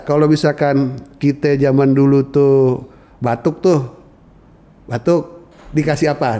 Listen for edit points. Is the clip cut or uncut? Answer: uncut